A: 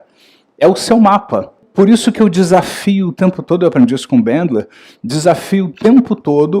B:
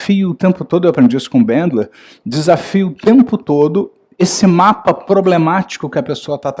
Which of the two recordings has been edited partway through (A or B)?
A